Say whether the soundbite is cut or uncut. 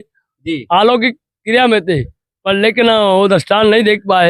uncut